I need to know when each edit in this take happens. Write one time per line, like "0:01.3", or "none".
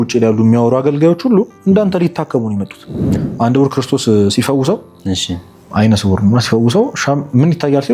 0:03.1